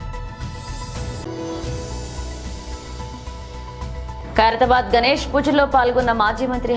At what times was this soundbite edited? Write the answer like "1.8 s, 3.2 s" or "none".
1.2 s, 2.9 s